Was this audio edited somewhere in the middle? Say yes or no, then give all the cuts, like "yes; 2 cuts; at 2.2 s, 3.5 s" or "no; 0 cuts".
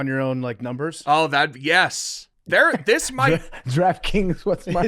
yes; 1 cut; at 2.0 s